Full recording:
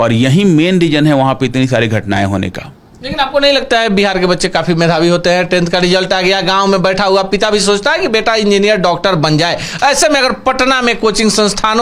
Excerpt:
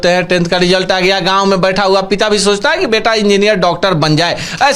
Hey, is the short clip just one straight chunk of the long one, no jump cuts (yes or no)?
yes